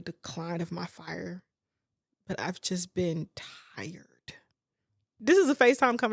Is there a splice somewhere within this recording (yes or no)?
yes